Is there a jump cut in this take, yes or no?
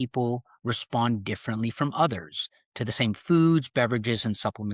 no